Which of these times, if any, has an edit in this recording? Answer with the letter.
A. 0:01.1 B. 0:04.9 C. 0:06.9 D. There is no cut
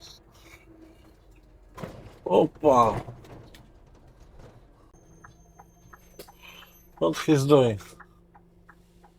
B